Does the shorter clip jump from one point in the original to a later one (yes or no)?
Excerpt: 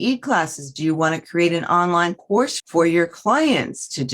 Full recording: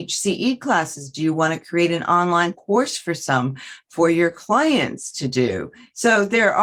yes